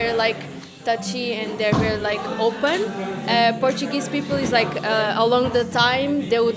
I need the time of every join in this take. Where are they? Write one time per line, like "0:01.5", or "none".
none